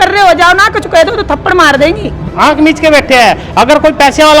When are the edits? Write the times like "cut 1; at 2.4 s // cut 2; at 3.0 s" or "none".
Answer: cut 1; at 2.2 s